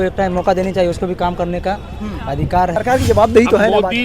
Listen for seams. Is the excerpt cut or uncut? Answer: cut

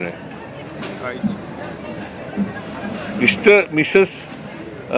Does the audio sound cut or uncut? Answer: uncut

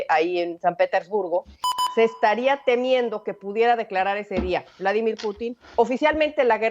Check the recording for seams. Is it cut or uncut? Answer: cut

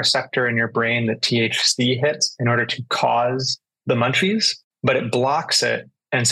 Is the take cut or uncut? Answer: uncut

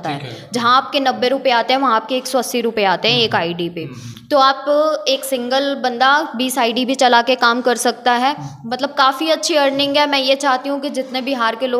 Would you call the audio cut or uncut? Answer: uncut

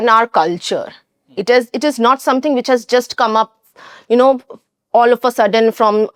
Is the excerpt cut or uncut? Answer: uncut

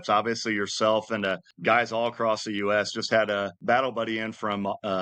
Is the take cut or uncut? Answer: cut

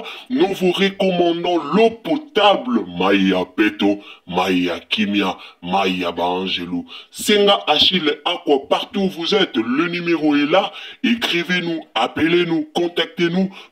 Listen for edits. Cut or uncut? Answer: uncut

